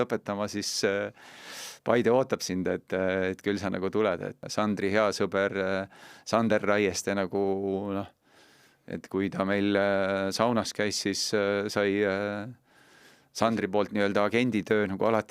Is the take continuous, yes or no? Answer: no